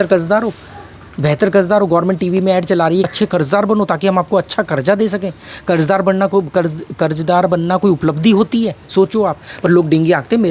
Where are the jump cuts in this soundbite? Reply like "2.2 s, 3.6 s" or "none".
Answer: 3.1 s